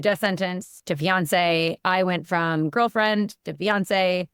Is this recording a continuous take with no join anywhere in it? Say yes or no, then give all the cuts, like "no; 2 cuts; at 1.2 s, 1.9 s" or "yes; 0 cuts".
yes; 0 cuts